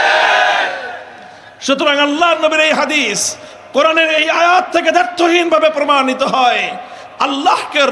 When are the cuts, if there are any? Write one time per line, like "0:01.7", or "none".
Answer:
none